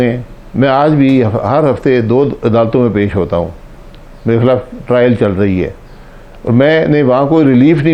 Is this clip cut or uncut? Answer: uncut